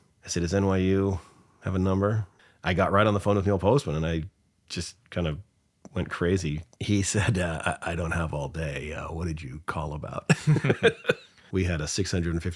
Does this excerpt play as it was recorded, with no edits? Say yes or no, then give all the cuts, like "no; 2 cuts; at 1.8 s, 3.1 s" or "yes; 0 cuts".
no; 3 cuts; at 2.3 s, 6.7 s, 11.3 s